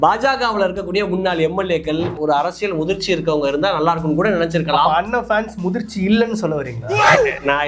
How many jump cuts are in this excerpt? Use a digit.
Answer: 1